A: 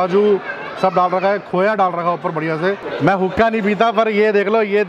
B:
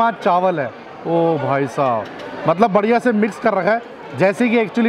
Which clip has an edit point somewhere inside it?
A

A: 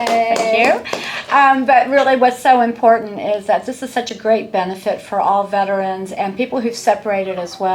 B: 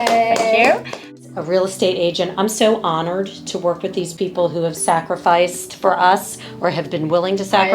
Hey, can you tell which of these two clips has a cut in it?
B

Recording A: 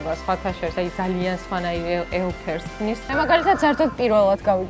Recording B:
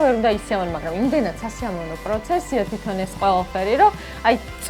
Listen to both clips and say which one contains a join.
A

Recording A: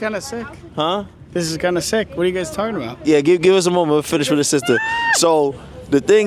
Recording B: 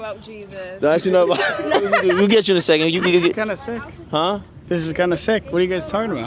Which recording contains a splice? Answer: B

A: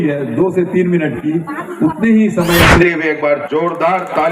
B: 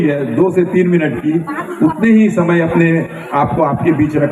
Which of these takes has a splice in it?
A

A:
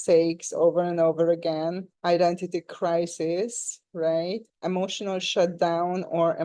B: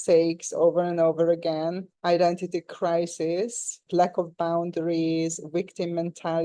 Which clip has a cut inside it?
B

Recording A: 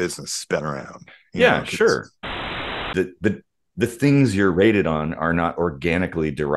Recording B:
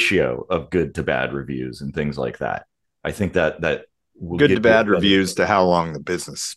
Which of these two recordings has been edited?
A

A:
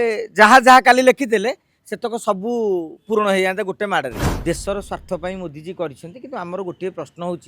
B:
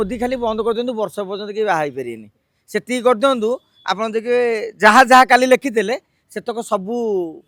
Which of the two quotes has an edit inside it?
A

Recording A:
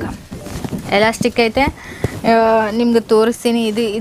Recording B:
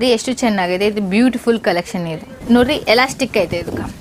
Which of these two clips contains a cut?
B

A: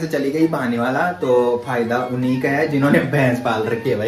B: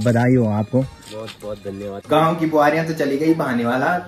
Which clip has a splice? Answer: B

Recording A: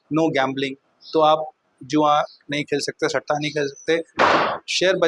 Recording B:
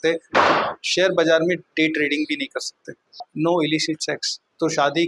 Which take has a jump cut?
B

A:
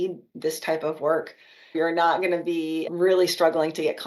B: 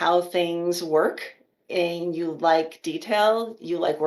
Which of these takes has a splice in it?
A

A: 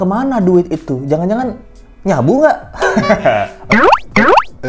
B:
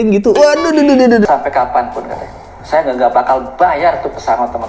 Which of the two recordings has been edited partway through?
B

